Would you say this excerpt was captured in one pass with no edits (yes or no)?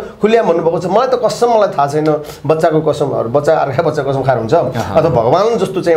yes